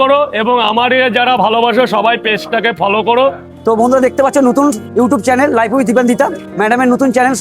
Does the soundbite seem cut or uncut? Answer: cut